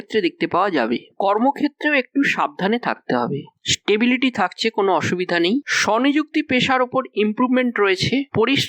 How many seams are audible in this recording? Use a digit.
2